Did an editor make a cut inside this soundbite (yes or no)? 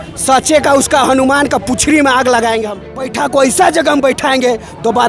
yes